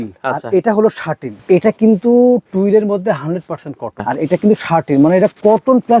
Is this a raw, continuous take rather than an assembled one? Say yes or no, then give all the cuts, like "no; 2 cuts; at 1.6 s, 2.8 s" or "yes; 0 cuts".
no; 2 cuts; at 1.4 s, 4.0 s